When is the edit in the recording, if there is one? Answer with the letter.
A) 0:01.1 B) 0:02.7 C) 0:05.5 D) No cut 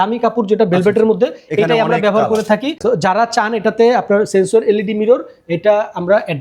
B